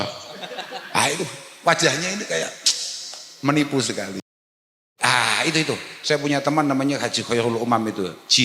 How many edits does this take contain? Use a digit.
1